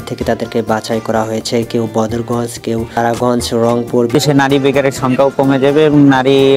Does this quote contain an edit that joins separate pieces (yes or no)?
yes